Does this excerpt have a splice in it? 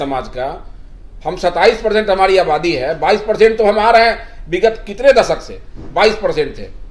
no; 0 cuts

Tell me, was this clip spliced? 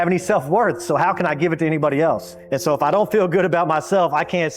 yes; 1 cut; at 2.3 s

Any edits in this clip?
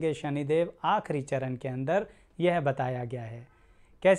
no; 0 cuts

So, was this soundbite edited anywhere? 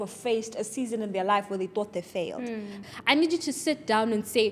yes; 1 cut; at 2.8 s

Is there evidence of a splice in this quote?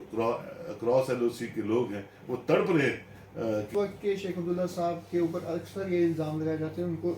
yes; 1 cut; at 3.7 s

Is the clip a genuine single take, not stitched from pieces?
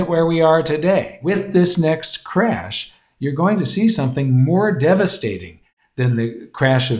no; 1 cut; at 1.2 s

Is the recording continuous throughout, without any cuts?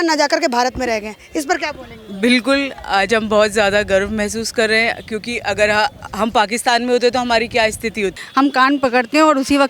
no; 1 cut; at 8.2 s

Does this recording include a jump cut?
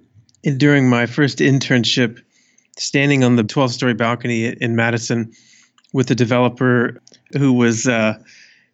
yes; 2 cuts; at 3.5 s, 4.6 s

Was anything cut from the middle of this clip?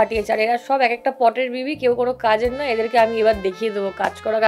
no; 0 cuts

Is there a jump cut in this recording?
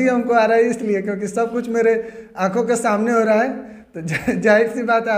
no; 0 cuts

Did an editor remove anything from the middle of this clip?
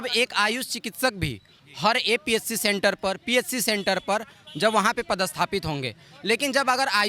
no; 0 cuts

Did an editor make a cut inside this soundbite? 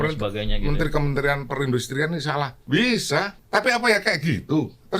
yes; 2 cuts; at 2.6 s, 3.4 s

